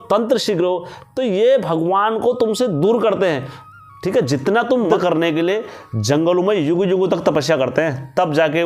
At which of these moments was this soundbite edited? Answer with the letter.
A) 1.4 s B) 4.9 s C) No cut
B